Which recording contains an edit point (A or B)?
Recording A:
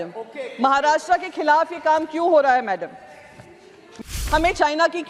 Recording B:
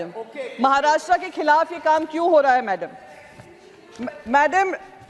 A